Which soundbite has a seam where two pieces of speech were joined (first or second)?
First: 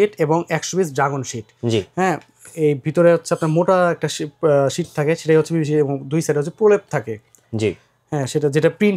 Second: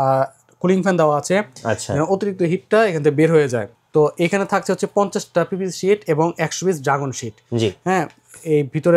second